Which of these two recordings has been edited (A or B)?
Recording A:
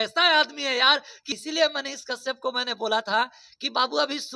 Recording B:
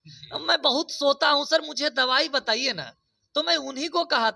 A